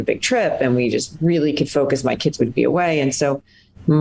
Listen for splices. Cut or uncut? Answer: uncut